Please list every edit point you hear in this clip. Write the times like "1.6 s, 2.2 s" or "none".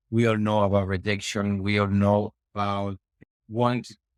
none

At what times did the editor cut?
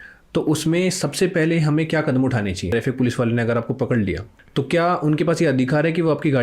2.6 s, 4.3 s

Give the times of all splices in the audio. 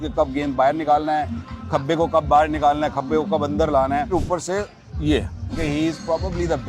4.1 s, 5.5 s

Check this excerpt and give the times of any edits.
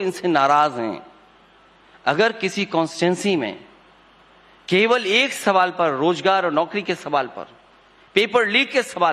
5.2 s

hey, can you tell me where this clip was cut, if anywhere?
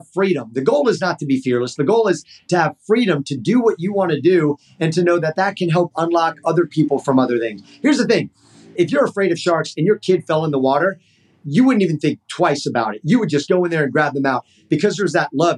8.7 s, 11.4 s

